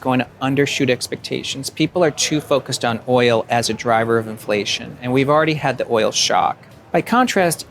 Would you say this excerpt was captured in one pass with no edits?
no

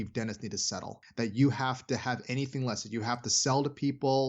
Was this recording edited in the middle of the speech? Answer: yes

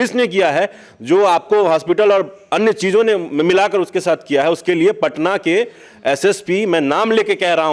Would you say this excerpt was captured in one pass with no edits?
yes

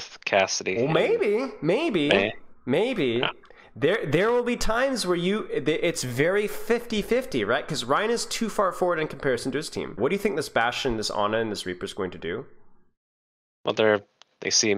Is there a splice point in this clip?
yes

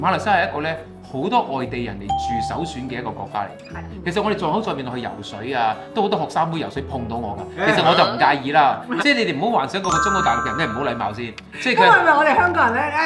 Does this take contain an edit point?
yes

